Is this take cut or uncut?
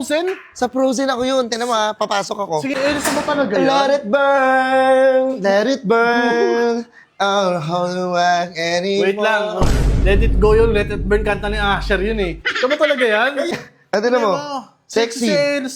cut